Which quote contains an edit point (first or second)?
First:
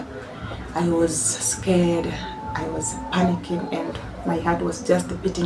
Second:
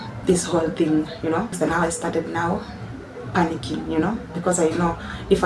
second